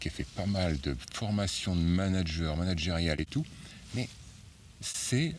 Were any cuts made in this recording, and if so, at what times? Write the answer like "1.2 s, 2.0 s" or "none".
none